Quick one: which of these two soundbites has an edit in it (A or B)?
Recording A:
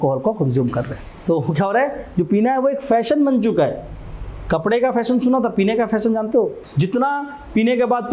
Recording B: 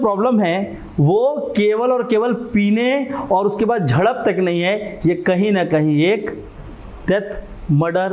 A